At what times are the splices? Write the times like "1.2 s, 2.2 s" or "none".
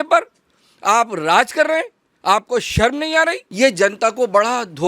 3.4 s